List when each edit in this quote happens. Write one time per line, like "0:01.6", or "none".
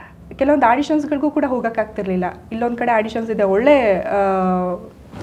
none